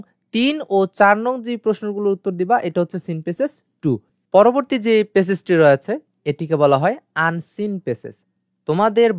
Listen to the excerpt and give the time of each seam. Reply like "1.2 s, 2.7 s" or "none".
4.1 s